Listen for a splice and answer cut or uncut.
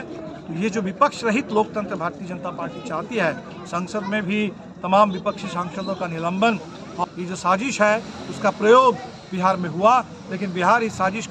cut